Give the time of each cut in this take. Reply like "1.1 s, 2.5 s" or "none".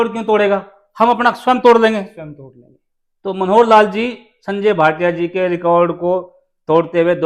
none